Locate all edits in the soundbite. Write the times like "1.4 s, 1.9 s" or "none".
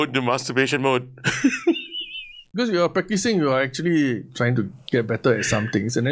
2.3 s

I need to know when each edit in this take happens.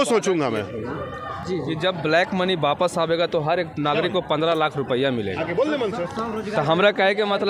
none

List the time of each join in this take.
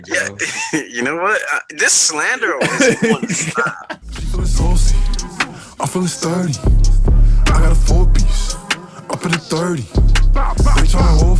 3.9 s

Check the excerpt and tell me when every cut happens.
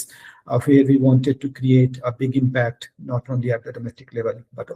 none

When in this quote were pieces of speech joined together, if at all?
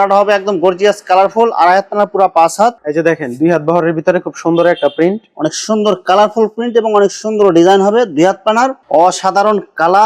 2.8 s, 8.8 s

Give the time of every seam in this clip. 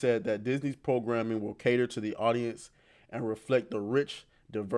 none

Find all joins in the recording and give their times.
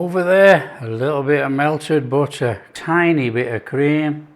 2.7 s

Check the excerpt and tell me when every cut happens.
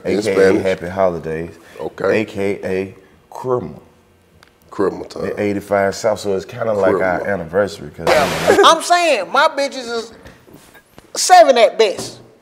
8.1 s

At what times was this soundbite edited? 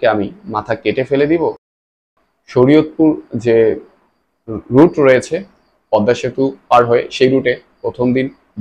2.0 s

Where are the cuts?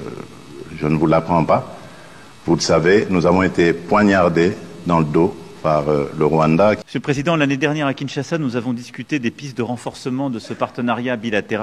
6.8 s

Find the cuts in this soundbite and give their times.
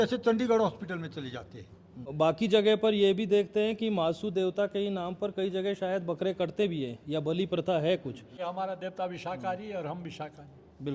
2.1 s, 8.4 s

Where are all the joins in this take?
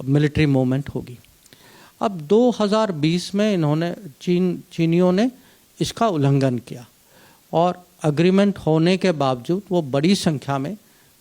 none

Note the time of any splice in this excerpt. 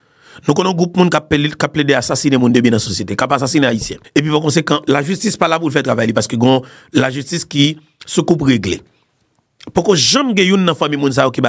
4.0 s

